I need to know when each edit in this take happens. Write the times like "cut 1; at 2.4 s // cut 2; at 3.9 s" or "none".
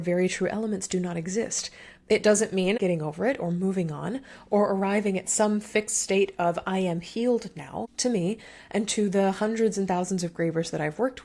cut 1; at 2.8 s // cut 2; at 7.9 s